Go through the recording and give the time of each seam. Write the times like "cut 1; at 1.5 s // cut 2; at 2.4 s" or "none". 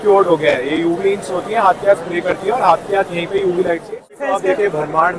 cut 1; at 4.2 s